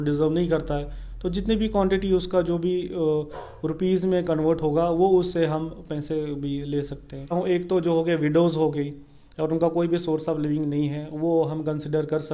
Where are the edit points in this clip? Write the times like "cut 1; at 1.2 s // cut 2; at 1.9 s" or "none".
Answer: cut 1; at 7.3 s